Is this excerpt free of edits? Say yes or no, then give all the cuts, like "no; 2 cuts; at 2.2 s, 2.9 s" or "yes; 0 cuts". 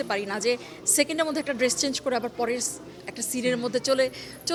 yes; 0 cuts